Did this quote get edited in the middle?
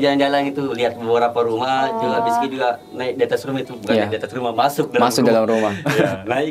no; 0 cuts

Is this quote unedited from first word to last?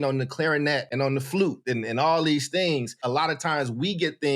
no; 2 cuts; at 0.9 s, 3.0 s

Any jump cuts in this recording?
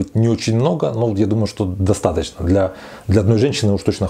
no; 0 cuts

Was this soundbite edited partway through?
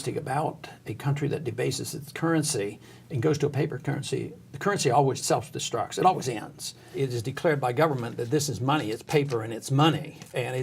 yes; 2 cuts; at 5.2 s, 6.9 s

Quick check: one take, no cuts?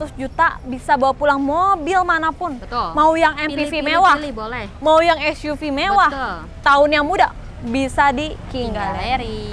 yes; 0 cuts

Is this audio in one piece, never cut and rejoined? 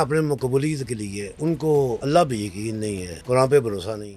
no; 3 cuts; at 1.2 s, 2.0 s, 3.1 s

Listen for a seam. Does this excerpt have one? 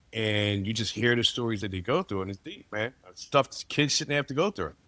yes; 1 cut; at 1.6 s

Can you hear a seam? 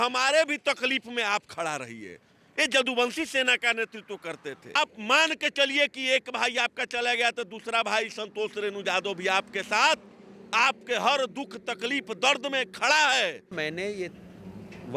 yes; 2 cuts; at 4.8 s, 13.6 s

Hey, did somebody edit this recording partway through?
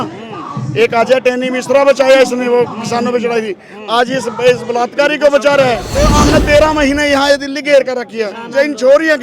yes; 1 cut; at 6.0 s

